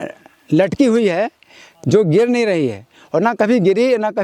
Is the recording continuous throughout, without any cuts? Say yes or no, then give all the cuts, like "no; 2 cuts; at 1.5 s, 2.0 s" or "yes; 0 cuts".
yes; 0 cuts